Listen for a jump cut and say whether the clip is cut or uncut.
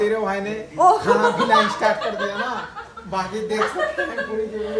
uncut